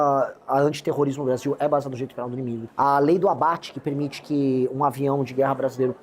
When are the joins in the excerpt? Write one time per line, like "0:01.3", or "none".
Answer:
0:02.6